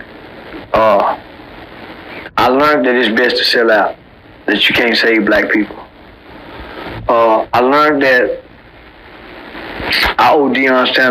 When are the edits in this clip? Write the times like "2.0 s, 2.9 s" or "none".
7.0 s

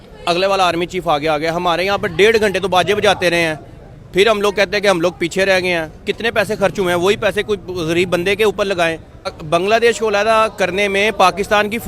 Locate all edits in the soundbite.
9.4 s

